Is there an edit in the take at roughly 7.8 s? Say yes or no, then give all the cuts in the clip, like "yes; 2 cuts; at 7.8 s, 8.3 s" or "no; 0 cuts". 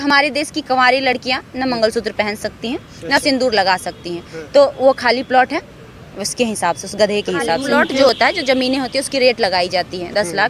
yes; 1 cut; at 7.8 s